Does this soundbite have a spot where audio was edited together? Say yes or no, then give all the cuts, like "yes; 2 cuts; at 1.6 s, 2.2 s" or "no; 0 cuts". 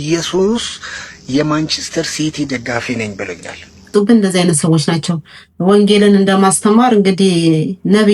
yes; 1 cut; at 3.9 s